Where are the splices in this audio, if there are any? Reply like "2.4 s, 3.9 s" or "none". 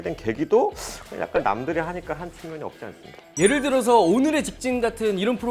3.3 s